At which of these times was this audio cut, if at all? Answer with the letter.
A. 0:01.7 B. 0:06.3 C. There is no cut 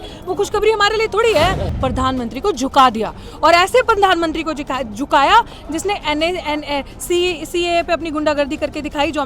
A